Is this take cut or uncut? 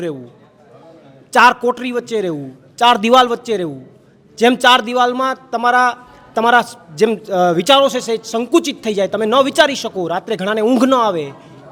uncut